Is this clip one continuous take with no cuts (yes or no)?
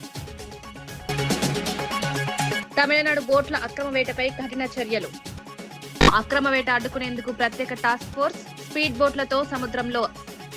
no